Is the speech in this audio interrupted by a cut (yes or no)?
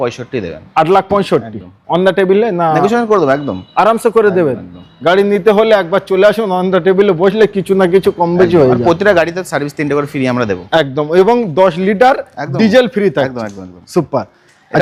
no